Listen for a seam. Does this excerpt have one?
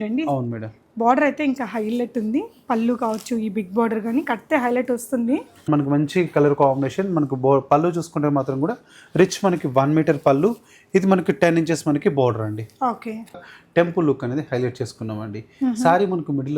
yes; 2 cuts; at 5.7 s, 13.4 s

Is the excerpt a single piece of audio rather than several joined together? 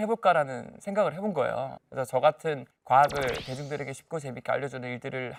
yes; 0 cuts

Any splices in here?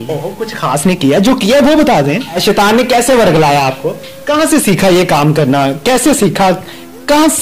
yes; 2 cuts; at 2.4 s, 4.1 s

